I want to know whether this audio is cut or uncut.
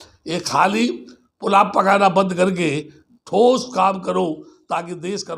uncut